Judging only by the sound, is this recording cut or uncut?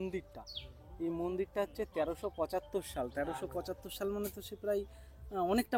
uncut